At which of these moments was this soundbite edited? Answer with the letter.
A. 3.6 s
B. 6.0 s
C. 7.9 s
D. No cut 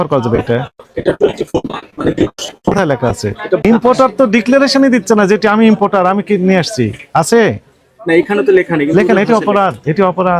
A